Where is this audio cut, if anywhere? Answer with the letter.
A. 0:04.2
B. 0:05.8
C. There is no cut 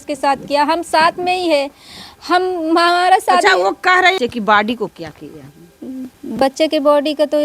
A